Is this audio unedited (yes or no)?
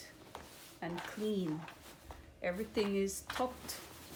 yes